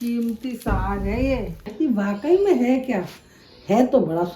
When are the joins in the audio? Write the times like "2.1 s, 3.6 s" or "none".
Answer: 1.7 s

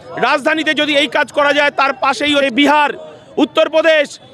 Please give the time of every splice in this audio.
2.4 s

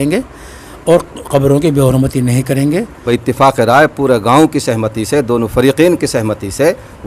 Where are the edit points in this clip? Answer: 3.0 s

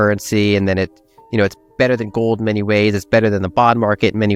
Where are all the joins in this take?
none

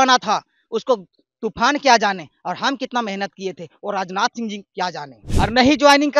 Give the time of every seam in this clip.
5.2 s

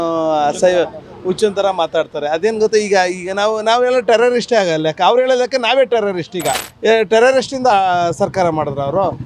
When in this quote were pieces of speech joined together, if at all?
6.7 s

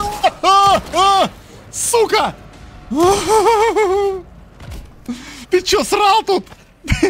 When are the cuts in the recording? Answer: none

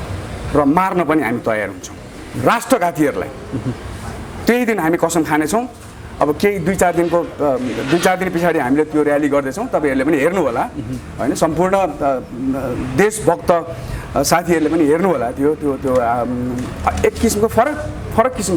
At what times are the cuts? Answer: none

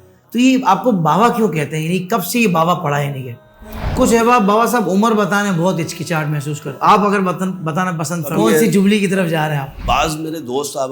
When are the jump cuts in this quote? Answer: 3.9 s, 6.6 s, 8.3 s, 9.7 s

